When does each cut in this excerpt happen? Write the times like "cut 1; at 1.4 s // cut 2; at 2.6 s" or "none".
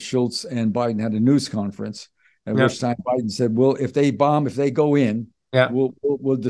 none